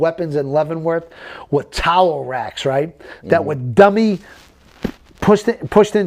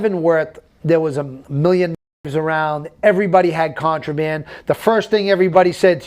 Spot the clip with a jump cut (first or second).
second